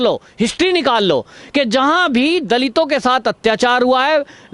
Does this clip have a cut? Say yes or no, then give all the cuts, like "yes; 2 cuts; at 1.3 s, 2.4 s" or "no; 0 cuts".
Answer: no; 0 cuts